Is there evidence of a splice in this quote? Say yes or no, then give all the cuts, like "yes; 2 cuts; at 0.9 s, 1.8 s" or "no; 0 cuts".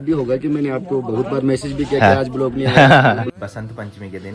yes; 1 cut; at 3.3 s